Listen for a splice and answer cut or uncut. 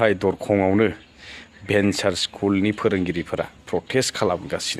uncut